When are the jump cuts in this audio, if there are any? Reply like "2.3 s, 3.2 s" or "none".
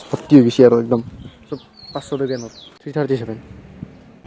none

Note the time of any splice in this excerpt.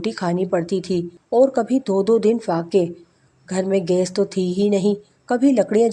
1.2 s

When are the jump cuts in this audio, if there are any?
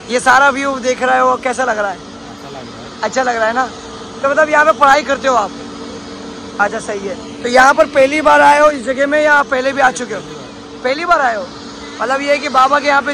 none

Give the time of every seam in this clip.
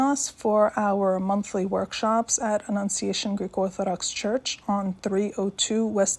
none

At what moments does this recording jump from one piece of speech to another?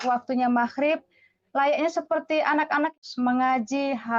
3.0 s

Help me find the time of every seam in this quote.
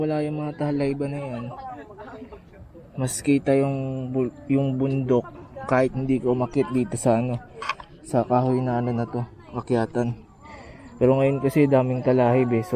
none

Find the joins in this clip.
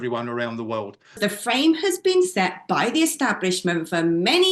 1.2 s

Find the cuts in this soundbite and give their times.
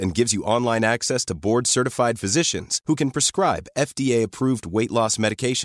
none

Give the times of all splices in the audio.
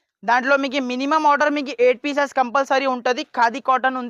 none

